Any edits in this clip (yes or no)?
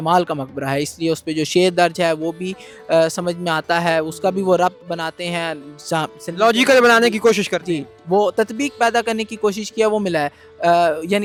no